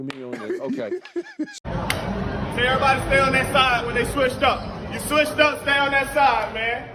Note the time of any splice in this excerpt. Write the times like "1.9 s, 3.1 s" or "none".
1.6 s